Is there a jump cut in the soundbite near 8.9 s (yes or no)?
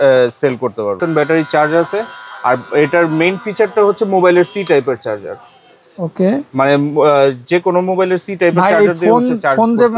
no